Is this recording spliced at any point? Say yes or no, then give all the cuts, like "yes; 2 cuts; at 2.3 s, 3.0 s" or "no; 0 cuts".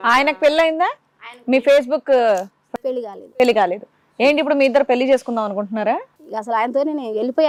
no; 0 cuts